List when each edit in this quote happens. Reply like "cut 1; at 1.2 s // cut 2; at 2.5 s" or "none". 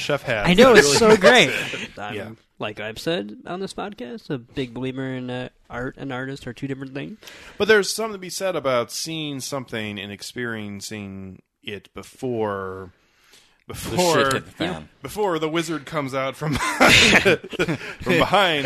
cut 1; at 1.8 s